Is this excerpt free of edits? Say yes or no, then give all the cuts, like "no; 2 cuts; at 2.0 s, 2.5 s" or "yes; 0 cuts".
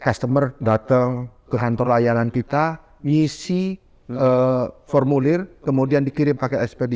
yes; 0 cuts